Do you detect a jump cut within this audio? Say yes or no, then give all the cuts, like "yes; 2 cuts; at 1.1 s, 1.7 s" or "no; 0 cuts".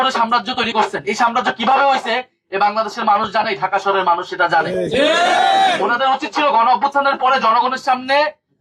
no; 0 cuts